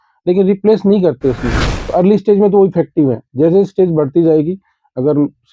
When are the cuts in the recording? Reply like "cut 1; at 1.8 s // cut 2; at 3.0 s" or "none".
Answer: cut 1; at 1.6 s